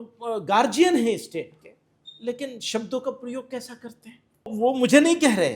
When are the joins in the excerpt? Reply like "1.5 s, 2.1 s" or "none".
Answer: 4.5 s